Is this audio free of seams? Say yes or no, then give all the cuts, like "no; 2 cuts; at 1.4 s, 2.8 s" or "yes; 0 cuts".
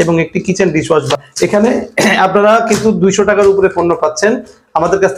no; 1 cut; at 1.2 s